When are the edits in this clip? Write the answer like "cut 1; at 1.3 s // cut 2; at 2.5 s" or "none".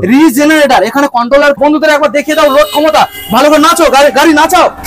cut 1; at 1.6 s